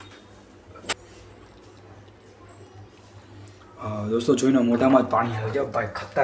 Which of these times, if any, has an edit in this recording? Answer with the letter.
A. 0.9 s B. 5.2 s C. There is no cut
A